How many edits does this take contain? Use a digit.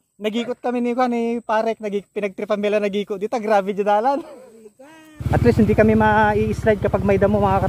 1